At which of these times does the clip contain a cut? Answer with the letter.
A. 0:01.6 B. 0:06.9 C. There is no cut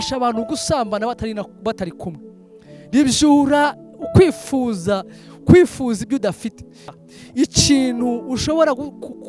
B